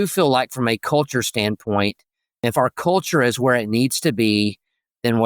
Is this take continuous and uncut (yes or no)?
no